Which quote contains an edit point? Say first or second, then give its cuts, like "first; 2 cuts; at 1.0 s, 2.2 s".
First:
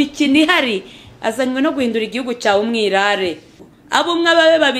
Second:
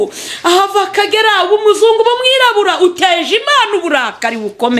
first; 1 cut; at 3.6 s